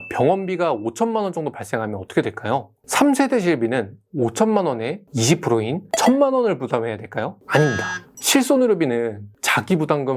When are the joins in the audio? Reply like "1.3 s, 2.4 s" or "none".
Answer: none

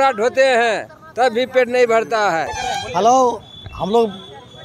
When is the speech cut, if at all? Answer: 2.6 s

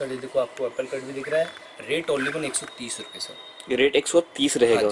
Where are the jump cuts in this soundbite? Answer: none

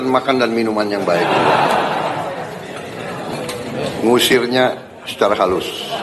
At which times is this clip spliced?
3.7 s

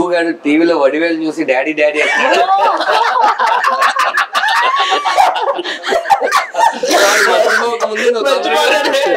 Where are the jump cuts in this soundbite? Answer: none

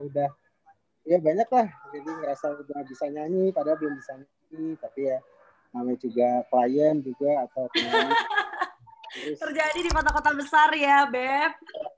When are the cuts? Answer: none

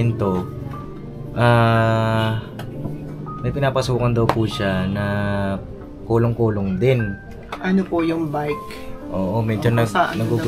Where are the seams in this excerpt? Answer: none

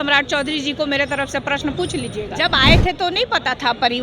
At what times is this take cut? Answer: 2.3 s

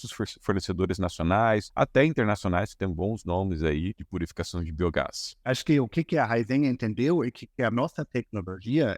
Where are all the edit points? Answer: 1.7 s, 4.0 s, 5.3 s

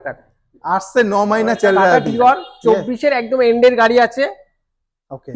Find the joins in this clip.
2.1 s

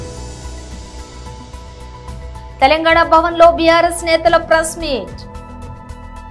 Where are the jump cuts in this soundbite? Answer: 1.0 s

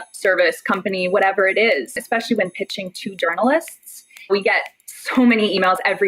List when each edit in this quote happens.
2.0 s, 4.3 s

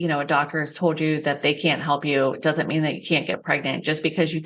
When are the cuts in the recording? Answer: none

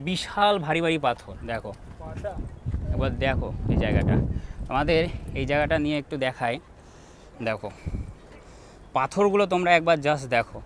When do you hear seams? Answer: none

